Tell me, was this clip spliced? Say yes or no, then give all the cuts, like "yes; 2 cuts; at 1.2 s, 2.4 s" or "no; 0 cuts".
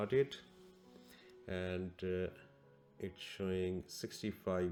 no; 0 cuts